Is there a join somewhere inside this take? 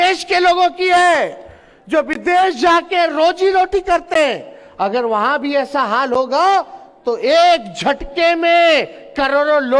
no; 0 cuts

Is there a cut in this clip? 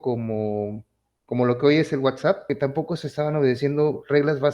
yes; 1 cut; at 2.5 s

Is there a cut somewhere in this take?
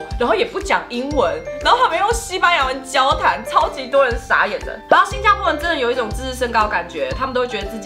yes; 1 cut; at 4.7 s

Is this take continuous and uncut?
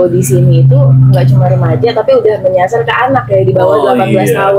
yes; 0 cuts

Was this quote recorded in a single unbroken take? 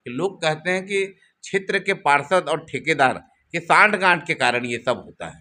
yes; 0 cuts

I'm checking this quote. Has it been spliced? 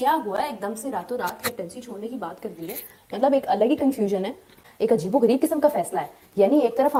no; 0 cuts

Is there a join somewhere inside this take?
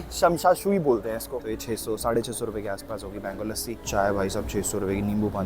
yes; 2 cuts; at 1.2 s, 3.8 s

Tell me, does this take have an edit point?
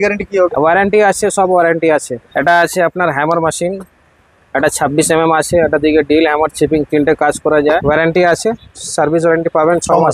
yes; 2 cuts; at 2.2 s, 7.7 s

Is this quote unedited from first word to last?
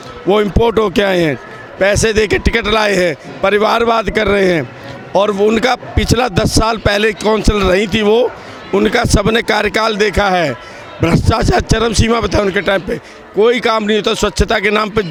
yes; 0 cuts

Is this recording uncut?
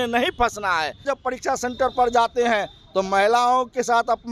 no; 1 cut; at 1.0 s

